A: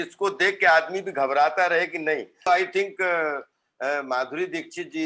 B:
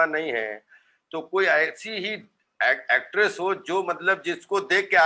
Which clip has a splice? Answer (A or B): A